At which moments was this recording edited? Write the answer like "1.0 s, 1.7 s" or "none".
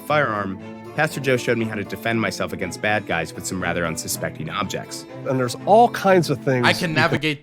none

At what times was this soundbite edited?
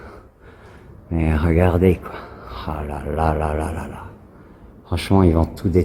none

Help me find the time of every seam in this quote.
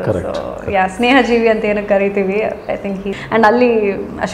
3.1 s

